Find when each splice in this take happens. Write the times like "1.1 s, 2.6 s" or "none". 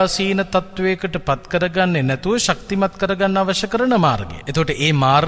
4.3 s